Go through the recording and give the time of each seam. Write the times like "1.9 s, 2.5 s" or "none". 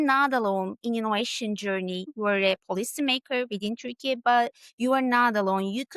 2.1 s